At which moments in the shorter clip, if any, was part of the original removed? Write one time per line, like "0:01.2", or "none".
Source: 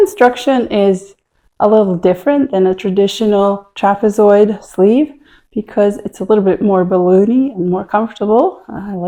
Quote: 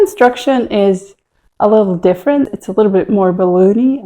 0:02.5